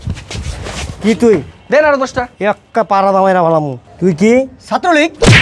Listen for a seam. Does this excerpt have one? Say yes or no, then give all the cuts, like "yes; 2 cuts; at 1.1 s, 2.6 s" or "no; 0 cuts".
no; 0 cuts